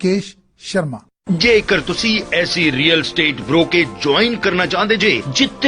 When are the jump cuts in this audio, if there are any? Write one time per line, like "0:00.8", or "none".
0:01.1